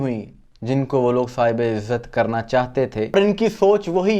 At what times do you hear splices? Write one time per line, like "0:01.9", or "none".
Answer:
0:03.1